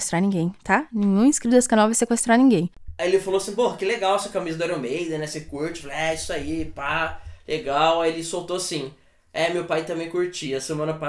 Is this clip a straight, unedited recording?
no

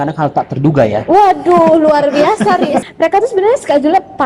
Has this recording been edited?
yes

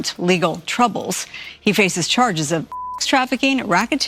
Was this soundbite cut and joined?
no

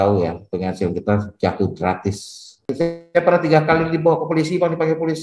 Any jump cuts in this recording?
yes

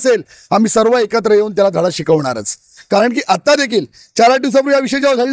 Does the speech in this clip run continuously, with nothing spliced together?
yes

